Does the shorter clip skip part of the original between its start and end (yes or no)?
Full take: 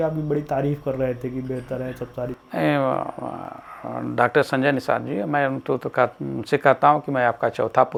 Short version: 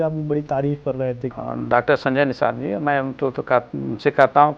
yes